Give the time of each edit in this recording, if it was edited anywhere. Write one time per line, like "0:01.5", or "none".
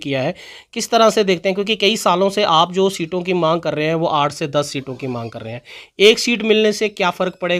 none